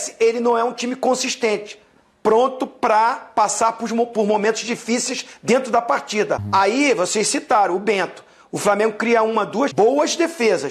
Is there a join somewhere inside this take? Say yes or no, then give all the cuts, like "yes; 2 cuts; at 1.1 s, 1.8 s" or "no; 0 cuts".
yes; 2 cuts; at 6.4 s, 9.7 s